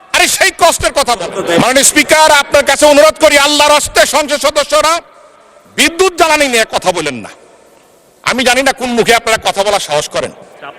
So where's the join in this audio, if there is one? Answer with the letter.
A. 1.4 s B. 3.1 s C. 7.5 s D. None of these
A